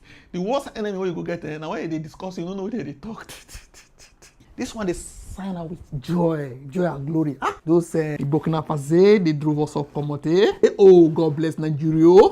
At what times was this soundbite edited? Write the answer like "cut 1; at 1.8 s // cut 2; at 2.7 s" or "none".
cut 1; at 4.4 s // cut 2; at 10.6 s